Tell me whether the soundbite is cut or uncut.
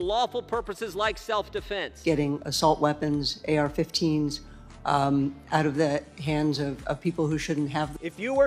cut